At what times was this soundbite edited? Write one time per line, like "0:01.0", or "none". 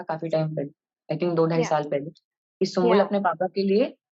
none